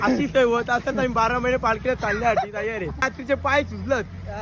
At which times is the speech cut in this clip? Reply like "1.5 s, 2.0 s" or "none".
3.0 s